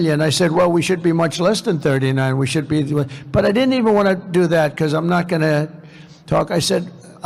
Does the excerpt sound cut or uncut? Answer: uncut